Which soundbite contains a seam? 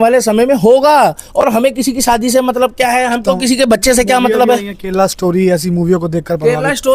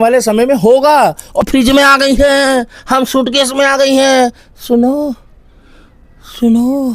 second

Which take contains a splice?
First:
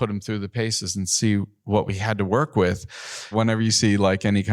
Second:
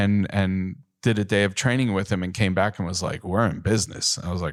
first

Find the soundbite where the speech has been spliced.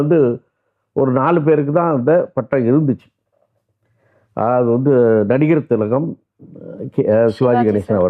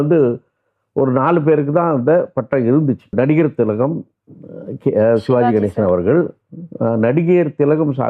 second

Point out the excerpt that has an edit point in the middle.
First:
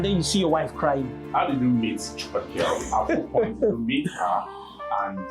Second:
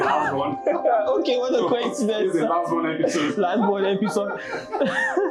first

